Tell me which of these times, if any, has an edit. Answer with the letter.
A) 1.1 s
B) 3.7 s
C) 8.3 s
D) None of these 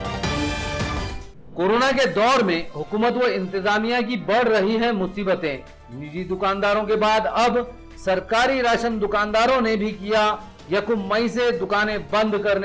A